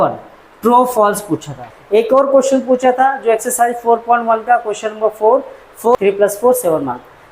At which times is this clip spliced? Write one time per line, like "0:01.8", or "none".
0:01.7
0:06.0